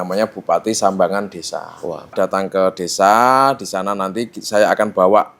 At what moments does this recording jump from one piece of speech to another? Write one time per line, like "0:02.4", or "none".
0:02.1

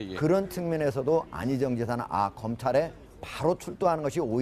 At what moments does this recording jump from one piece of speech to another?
none

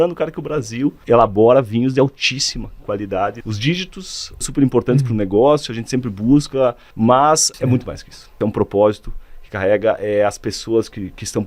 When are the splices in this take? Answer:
0:01.0
0:03.4
0:04.4
0:06.9
0:07.8

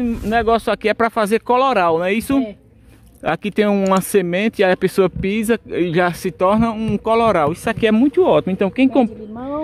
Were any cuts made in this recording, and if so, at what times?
none

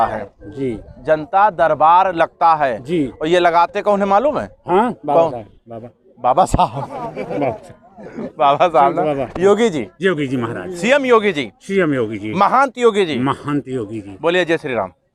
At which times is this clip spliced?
none

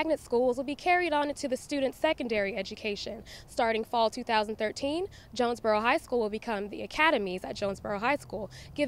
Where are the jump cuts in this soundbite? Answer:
none

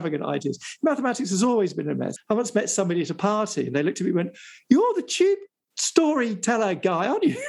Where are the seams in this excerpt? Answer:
0:02.1

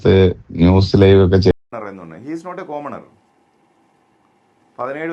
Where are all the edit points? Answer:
0:01.5

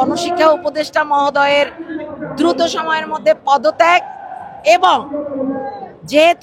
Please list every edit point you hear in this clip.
none

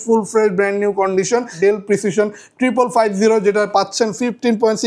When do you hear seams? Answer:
0:01.6

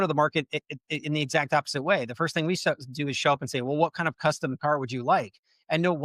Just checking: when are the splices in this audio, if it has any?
none

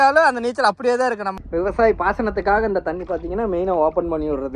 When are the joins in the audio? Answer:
0:01.3

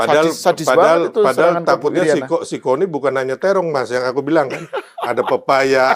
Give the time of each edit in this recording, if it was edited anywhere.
none

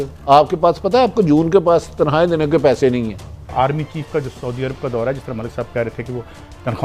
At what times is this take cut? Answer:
0:03.5

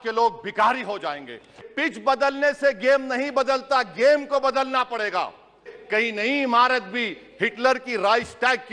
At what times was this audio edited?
0:01.6
0:05.7

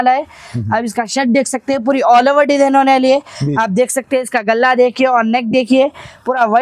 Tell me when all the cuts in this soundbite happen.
none

